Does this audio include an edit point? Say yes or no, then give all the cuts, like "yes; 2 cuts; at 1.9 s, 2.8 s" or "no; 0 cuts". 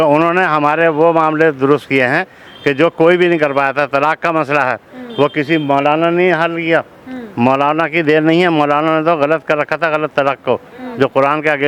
no; 0 cuts